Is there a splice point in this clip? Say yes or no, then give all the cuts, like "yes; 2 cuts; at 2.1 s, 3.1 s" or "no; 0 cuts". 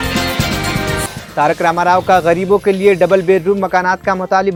no; 0 cuts